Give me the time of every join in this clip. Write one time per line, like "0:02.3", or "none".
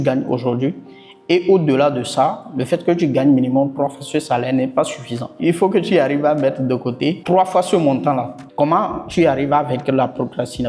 0:07.2
0:08.4

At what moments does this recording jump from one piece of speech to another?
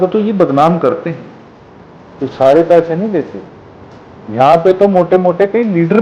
none

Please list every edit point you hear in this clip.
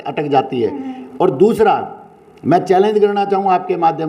none

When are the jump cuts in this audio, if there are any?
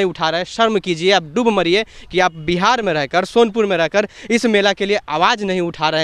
none

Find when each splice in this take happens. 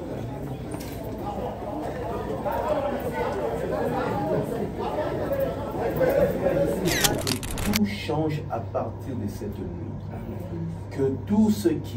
0:07.2

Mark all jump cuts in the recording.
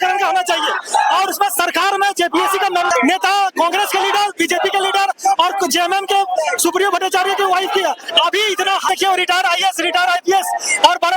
0:02.9
0:08.9

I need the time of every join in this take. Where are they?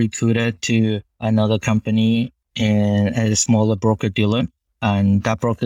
0:01.2
0:04.6

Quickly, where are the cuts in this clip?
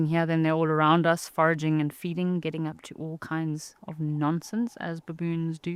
none

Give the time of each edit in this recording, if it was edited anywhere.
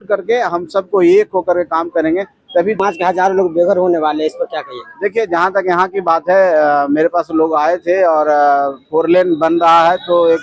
0:02.8

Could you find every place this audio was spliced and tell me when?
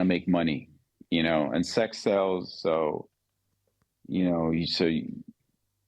none

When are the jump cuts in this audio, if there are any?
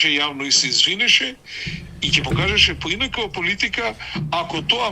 none

